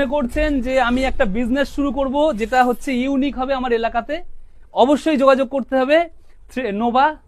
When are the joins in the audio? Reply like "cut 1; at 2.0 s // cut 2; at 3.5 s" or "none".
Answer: none